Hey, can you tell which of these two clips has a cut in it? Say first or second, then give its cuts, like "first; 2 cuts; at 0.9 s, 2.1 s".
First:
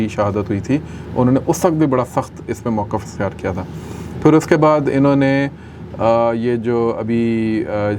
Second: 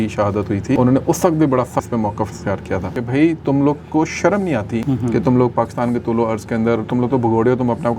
second; 4 cuts; at 0.8 s, 1.9 s, 2.9 s, 4.8 s